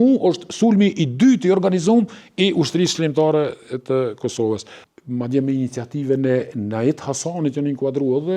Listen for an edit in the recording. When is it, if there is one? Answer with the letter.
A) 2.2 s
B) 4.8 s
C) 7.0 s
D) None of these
B